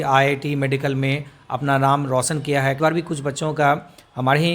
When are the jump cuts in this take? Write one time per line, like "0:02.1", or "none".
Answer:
0:02.8